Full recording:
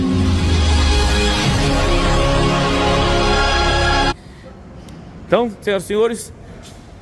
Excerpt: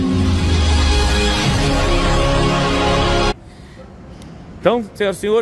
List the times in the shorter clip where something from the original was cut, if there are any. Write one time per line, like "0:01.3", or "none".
0:03.4